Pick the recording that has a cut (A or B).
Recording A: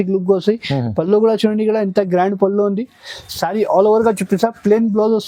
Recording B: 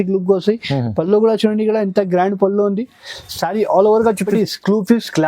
B